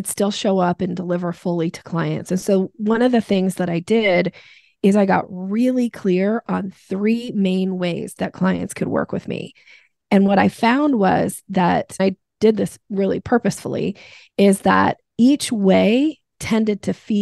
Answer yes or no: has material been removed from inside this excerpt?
yes